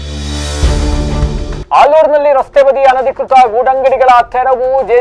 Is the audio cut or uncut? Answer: uncut